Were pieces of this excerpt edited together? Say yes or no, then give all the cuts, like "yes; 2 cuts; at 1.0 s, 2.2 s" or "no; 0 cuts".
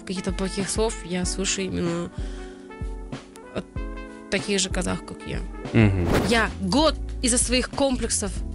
yes; 1 cut; at 6.2 s